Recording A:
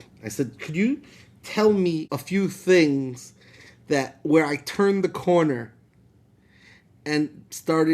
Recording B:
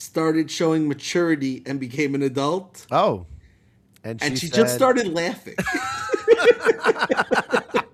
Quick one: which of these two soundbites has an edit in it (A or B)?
A